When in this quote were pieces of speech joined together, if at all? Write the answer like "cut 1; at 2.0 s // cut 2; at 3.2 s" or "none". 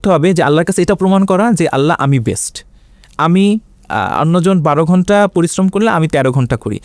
none

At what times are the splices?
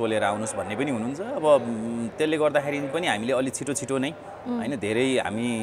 none

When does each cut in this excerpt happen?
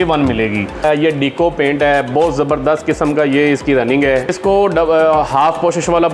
cut 1; at 0.8 s // cut 2; at 4.3 s

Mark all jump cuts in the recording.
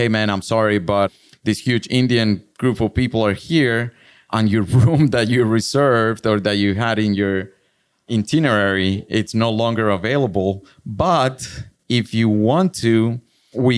none

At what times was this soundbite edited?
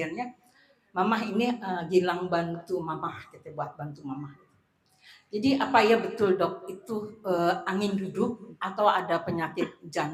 none

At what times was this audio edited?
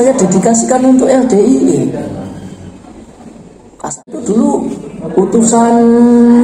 cut 1; at 4.0 s

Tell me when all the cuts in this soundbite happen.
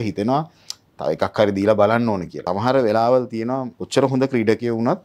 cut 1; at 2.4 s // cut 2; at 3.8 s

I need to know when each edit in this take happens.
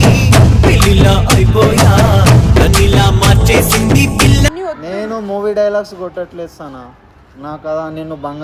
cut 1; at 4.6 s

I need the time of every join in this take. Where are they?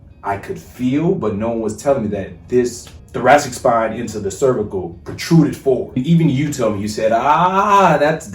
cut 1; at 6.0 s

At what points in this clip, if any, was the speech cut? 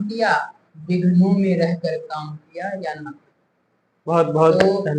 none

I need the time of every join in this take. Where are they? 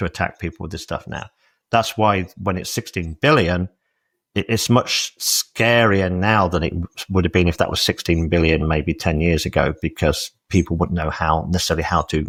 none

